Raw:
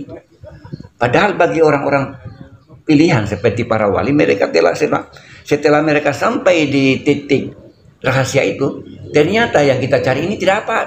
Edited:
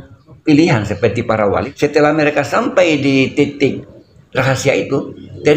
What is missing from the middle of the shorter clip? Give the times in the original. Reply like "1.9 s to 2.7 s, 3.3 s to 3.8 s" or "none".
4.0 s to 5.3 s

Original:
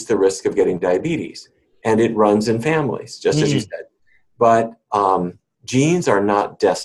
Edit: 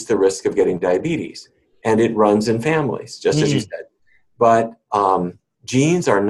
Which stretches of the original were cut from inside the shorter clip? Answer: none

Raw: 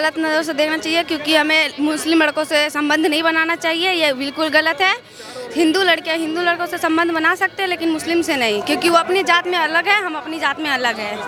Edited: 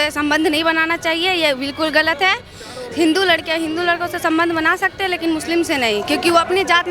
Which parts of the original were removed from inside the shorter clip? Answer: none

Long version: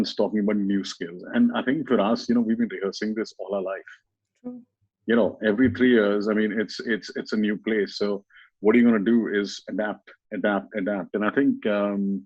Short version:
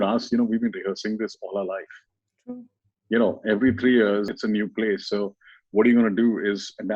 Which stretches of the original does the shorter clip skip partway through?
6.2 s to 7.1 s

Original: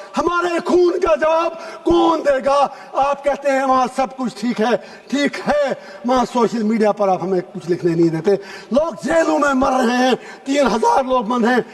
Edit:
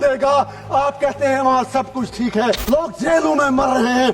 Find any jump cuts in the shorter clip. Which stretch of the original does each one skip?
4.9 s to 8.7 s

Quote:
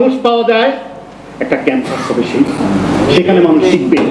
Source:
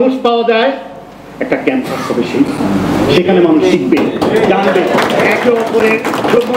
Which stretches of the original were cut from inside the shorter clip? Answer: none

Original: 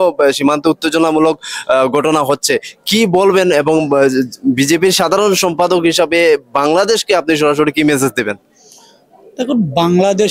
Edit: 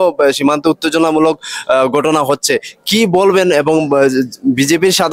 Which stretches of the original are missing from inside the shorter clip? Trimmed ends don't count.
none

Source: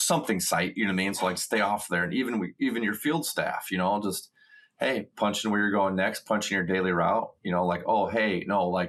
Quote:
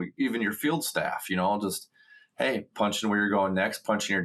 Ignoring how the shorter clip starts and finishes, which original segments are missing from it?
none

